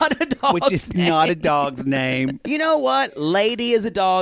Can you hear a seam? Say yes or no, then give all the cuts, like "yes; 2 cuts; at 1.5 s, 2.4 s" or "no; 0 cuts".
yes; 1 cut; at 2.5 s